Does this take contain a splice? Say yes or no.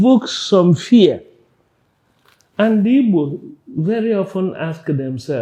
no